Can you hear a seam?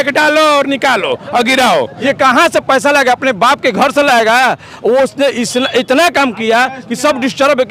yes; 1 cut; at 1.9 s

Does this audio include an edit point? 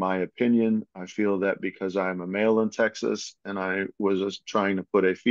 no; 0 cuts

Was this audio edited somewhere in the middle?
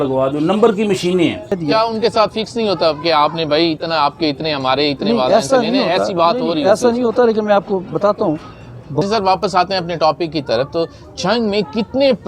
yes; 2 cuts; at 1.6 s, 9.0 s

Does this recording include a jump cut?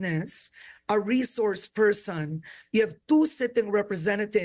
no; 0 cuts

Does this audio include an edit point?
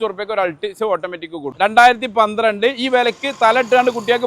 yes; 1 cut; at 1.5 s

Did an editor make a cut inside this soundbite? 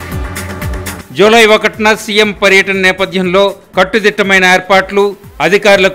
yes; 1 cut; at 1.0 s

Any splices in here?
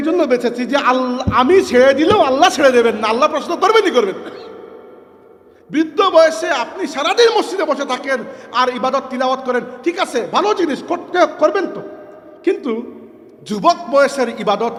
no; 0 cuts

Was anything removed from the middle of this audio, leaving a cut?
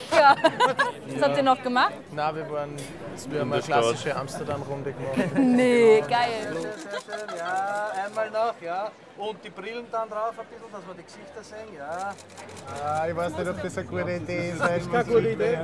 no; 0 cuts

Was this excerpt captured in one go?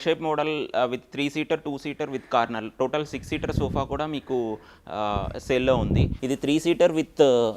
no; 1 cut; at 6.2 s

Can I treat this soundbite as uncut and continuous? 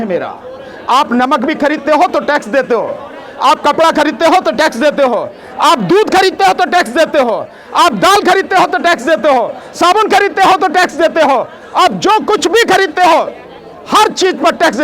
yes; 0 cuts

